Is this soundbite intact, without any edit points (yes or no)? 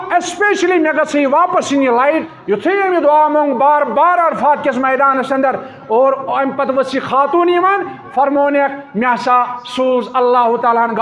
no